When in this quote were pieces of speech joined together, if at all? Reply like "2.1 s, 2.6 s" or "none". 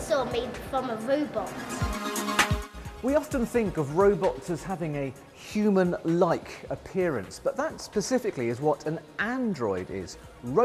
7.0 s